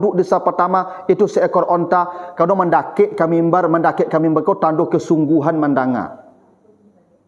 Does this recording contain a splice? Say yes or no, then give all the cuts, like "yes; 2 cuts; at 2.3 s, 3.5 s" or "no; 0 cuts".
no; 0 cuts